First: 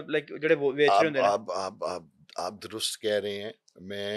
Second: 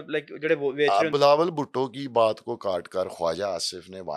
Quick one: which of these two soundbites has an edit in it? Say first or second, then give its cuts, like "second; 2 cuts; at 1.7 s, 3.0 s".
second; 1 cut; at 1.1 s